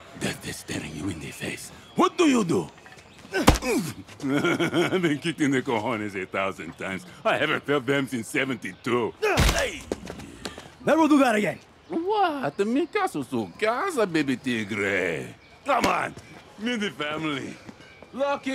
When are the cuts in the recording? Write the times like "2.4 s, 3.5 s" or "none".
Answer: none